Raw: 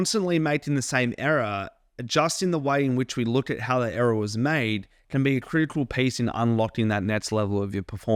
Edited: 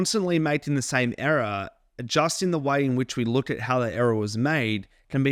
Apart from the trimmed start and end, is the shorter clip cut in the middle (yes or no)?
no